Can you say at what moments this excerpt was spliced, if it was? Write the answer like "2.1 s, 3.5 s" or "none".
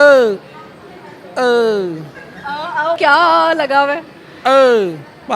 3.0 s